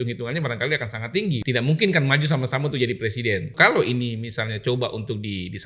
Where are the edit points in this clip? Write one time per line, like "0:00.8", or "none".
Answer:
0:01.4
0:03.5